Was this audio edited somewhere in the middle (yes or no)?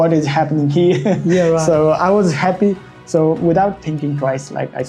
no